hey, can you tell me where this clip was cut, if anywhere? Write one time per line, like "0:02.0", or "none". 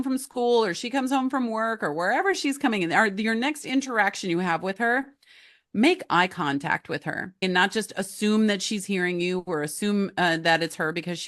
0:07.4